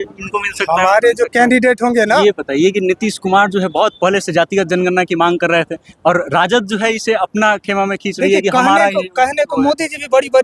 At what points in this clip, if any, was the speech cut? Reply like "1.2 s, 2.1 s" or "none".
2.1 s